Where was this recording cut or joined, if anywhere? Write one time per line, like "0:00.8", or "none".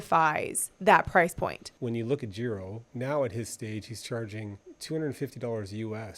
0:01.7
0:02.8
0:04.7